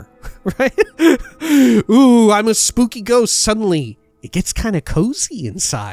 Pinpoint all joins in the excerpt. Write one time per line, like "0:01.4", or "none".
none